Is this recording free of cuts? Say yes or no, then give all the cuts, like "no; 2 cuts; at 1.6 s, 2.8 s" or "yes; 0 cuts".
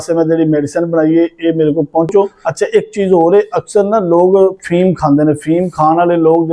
no; 1 cut; at 2.4 s